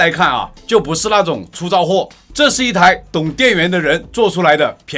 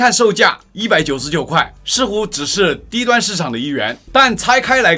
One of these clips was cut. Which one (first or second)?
first